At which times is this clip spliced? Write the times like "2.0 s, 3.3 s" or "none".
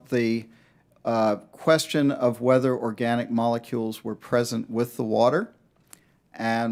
none